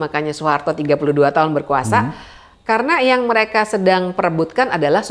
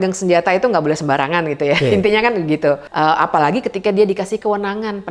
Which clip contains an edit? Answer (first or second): second